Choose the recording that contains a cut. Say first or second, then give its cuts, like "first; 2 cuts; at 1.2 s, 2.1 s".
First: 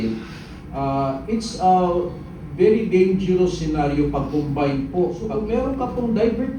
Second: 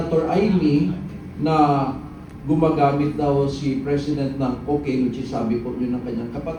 first; 1 cut; at 5.2 s